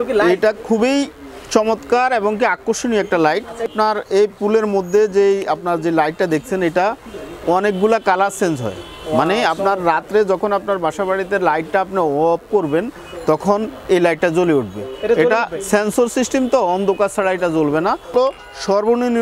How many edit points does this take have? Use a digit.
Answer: 2